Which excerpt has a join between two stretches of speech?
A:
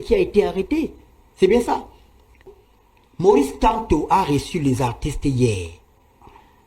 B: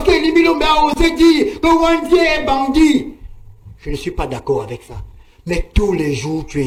A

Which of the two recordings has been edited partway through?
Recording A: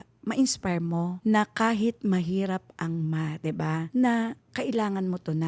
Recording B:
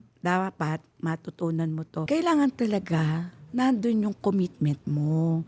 B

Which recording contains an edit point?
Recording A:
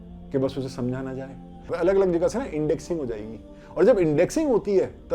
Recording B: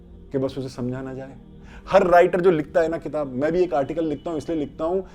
A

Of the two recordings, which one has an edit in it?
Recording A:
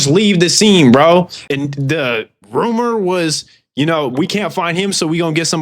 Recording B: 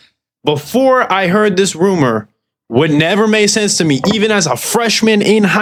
A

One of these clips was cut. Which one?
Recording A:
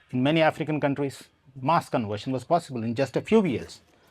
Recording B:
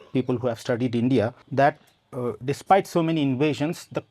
B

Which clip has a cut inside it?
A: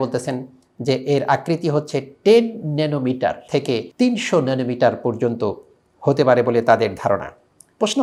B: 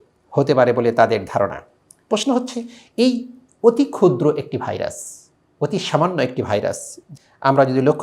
B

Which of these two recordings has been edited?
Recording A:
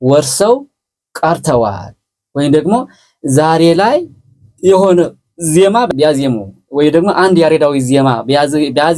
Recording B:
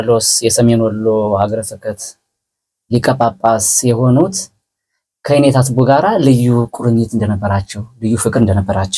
A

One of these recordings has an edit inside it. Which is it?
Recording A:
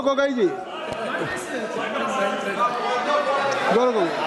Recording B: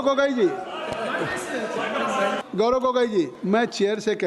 B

